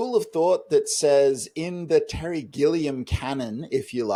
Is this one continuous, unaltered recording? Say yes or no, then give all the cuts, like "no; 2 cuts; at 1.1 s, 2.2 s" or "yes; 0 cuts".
yes; 0 cuts